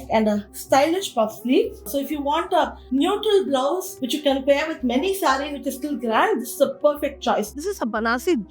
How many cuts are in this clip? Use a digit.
2